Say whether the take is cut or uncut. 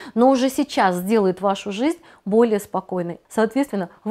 cut